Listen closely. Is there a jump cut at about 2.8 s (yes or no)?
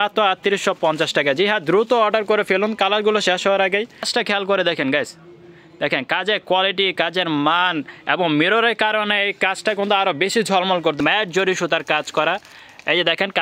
no